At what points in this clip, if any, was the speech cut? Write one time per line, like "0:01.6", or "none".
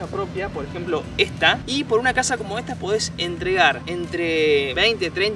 0:01.6
0:03.9